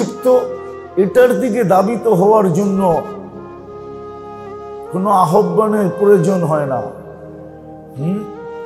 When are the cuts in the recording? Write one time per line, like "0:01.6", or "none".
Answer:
0:03.2
0:04.9